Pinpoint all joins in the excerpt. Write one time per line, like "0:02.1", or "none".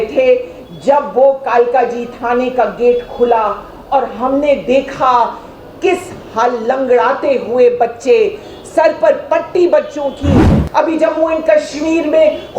0:10.6